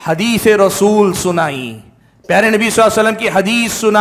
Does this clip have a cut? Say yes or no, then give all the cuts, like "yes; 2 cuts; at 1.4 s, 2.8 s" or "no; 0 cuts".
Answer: no; 0 cuts